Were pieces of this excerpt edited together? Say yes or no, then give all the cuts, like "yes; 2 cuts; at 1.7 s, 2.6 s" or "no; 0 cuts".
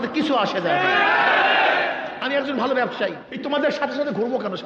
yes; 1 cut; at 3.3 s